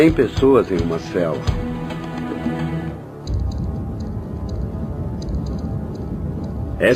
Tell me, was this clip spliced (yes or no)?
yes